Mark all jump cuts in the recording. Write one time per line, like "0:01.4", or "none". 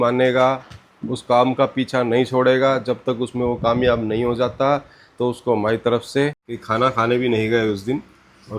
0:06.5